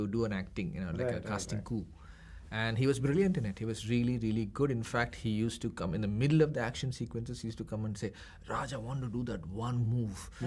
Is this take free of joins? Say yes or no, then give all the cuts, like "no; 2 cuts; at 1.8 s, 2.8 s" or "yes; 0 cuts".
yes; 0 cuts